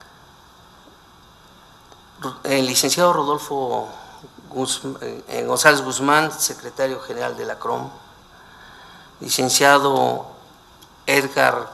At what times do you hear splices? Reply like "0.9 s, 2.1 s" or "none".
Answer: none